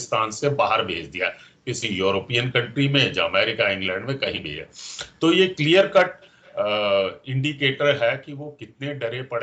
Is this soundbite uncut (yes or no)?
yes